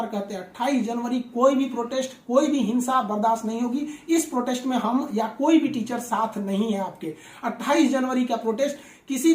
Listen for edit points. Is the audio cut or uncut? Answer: uncut